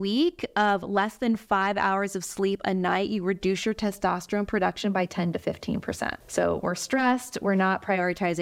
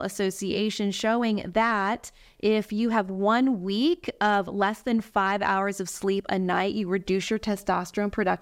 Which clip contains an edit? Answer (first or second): first